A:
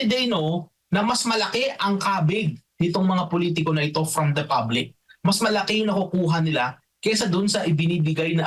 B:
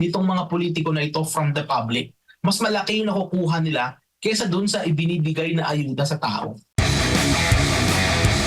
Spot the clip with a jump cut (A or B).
B